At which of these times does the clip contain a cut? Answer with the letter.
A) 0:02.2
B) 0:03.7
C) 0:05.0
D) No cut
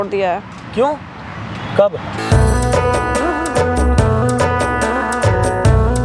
A